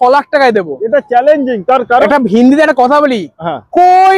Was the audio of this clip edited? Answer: yes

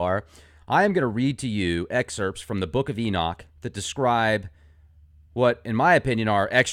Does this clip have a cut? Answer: no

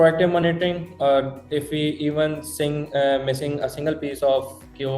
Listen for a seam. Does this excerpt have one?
no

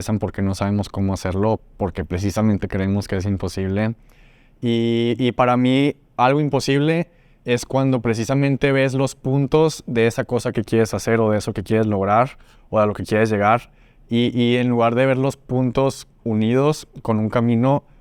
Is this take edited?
no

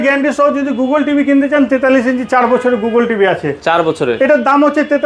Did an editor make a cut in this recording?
no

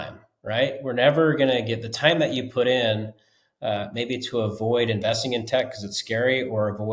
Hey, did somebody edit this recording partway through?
no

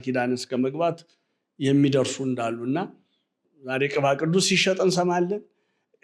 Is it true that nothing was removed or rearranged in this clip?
no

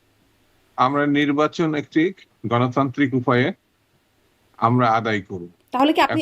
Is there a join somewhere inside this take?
no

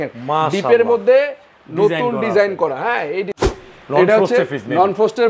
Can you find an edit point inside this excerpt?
yes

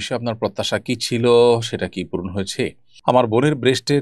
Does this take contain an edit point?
yes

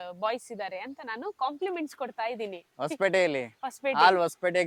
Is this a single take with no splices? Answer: yes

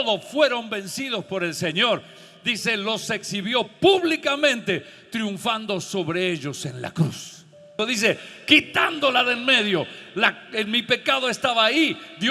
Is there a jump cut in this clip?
yes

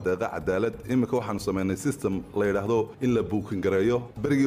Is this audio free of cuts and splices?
yes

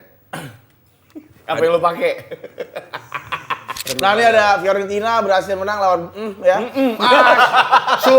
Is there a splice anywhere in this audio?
yes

